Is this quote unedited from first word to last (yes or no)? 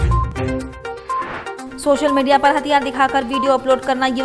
no